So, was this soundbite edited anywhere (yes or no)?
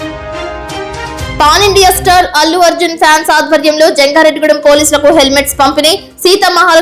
yes